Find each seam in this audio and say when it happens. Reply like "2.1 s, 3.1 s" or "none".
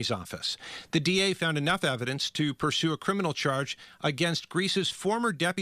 none